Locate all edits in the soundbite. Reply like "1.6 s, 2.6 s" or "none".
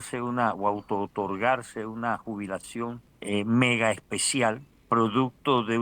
3.1 s, 4.7 s